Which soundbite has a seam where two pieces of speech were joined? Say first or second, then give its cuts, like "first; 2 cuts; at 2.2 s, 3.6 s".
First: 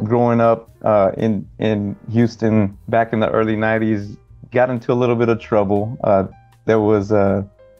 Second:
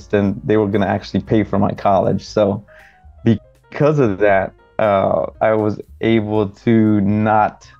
first; 1 cut; at 2.8 s